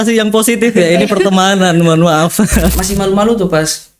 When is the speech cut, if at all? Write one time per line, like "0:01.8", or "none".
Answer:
0:02.8